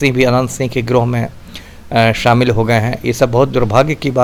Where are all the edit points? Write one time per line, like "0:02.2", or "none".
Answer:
none